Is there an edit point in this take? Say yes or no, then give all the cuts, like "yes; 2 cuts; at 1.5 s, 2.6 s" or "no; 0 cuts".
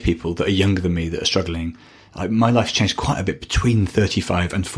no; 0 cuts